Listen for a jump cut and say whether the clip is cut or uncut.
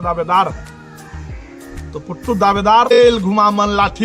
cut